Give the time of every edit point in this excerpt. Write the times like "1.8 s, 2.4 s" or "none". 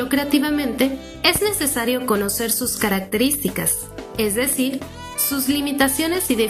none